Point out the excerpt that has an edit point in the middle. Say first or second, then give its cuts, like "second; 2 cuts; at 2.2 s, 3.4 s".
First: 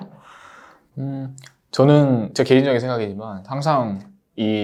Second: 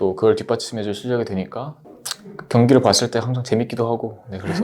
second; 1 cut; at 1.8 s